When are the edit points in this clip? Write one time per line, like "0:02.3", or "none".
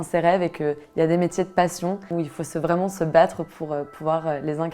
none